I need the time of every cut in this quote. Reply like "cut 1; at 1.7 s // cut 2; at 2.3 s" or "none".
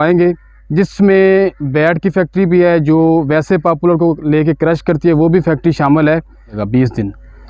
cut 1; at 6.6 s